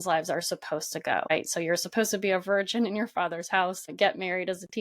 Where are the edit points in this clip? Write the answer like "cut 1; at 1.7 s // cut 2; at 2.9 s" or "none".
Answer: cut 1; at 1.3 s // cut 2; at 3.8 s